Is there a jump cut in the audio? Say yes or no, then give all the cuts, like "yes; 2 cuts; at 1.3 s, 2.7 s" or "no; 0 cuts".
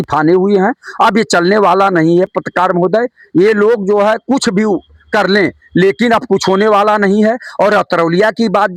no; 0 cuts